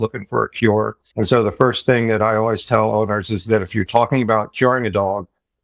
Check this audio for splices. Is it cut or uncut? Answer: cut